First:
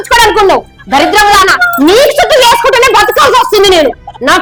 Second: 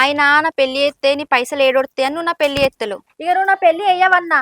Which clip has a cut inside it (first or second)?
second